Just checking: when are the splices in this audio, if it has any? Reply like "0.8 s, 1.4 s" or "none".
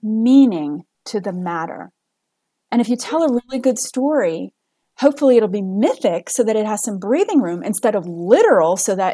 none